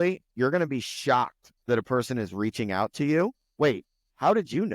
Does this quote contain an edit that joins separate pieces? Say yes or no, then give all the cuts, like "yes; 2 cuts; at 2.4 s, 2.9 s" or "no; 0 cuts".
yes; 1 cut; at 3.8 s